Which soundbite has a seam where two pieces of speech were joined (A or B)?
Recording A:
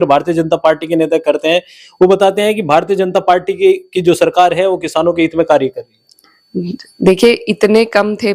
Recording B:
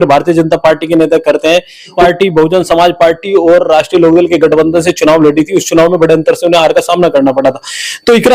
B